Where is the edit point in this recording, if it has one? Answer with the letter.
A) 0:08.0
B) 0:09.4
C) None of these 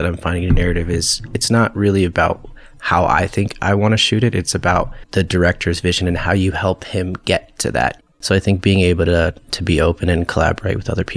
A